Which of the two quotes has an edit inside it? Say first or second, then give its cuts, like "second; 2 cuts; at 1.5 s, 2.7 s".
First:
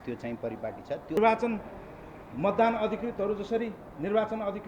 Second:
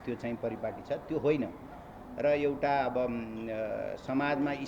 first; 1 cut; at 1.2 s